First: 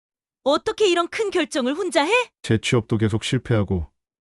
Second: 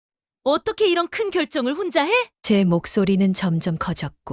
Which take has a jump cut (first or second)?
first